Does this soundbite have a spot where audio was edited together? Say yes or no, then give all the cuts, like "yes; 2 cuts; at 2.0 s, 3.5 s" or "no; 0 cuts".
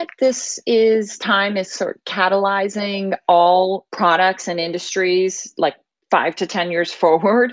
yes; 2 cuts; at 3.8 s, 5.9 s